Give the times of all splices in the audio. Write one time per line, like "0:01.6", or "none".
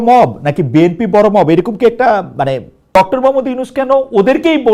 0:02.9